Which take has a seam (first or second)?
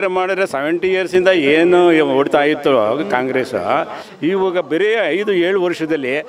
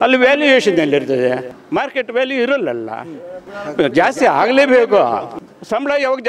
second